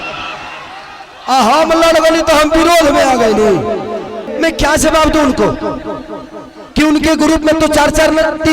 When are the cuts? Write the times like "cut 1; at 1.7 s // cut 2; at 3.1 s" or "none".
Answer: cut 1; at 4.3 s